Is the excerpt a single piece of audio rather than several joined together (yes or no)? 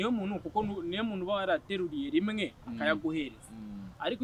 yes